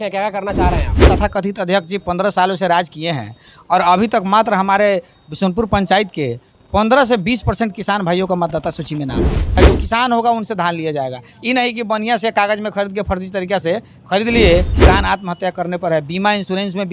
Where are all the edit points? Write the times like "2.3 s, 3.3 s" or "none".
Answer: 1.0 s, 9.5 s, 14.7 s